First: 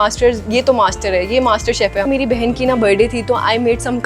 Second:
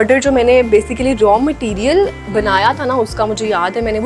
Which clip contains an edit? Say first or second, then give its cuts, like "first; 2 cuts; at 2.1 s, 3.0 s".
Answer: first; 1 cut; at 2.0 s